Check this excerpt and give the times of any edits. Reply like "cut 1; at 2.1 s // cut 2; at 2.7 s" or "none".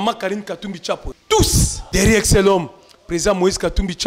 cut 1; at 1.1 s // cut 2; at 1.8 s